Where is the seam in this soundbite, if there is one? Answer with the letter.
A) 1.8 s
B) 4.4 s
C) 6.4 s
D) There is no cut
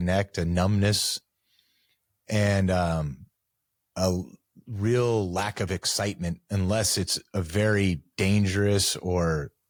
D